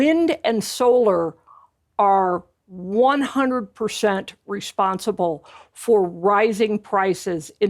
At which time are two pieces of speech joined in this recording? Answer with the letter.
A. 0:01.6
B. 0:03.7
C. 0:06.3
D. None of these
D